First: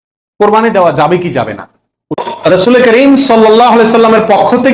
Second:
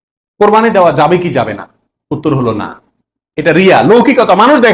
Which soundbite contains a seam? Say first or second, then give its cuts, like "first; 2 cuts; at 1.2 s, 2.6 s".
first; 1 cut; at 2.5 s